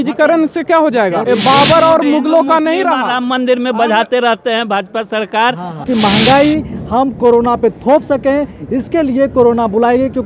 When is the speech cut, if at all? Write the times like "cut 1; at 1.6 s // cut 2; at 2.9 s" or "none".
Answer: cut 1; at 1.2 s // cut 2; at 5.8 s